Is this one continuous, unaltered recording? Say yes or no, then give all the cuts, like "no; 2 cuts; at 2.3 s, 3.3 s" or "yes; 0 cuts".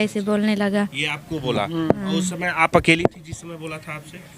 yes; 0 cuts